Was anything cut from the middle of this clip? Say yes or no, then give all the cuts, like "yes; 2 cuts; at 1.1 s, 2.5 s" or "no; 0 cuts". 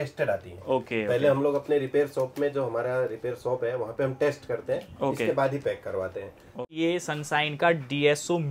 yes; 1 cut; at 6.6 s